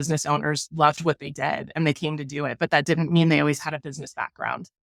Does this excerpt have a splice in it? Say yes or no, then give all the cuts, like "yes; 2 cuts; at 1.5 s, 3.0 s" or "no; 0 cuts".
no; 0 cuts